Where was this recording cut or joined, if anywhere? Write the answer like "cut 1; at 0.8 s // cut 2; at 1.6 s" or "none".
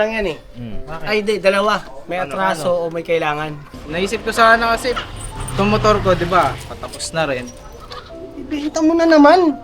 cut 1; at 3.6 s